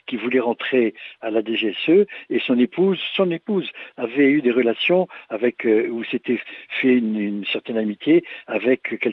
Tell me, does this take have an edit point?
no; 0 cuts

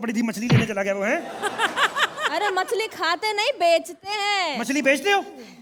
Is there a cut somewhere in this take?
no; 0 cuts

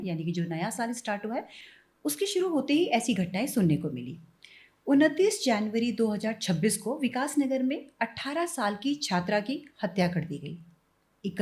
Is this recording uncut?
yes; 0 cuts

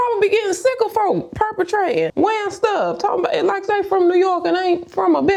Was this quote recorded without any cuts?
yes; 0 cuts

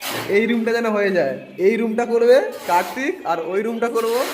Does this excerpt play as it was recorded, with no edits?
no; 1 cut; at 1.4 s

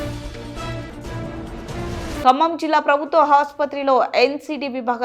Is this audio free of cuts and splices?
no; 1 cut; at 1.6 s

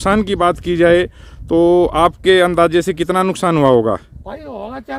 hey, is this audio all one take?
yes; 0 cuts

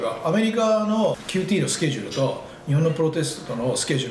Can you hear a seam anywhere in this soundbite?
yes; 1 cut; at 1.2 s

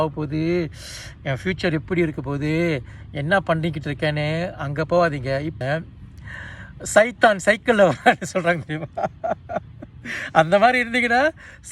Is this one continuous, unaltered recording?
no; 1 cut; at 5.6 s

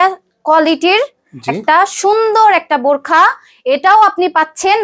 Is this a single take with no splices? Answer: yes; 0 cuts

